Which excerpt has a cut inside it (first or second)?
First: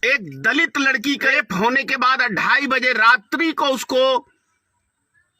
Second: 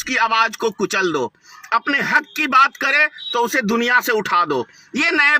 first